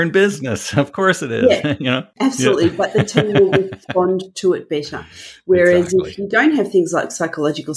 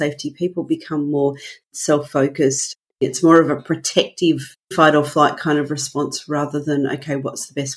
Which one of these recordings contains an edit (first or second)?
second